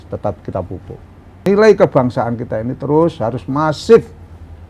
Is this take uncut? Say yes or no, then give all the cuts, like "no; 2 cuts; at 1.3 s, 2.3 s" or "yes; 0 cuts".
no; 1 cut; at 1.5 s